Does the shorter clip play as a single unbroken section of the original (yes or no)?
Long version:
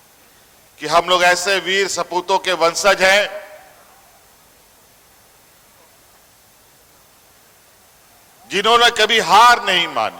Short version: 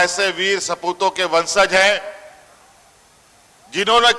no